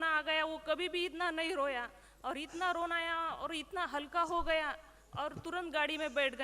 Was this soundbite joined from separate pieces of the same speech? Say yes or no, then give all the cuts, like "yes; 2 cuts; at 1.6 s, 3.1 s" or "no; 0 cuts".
no; 0 cuts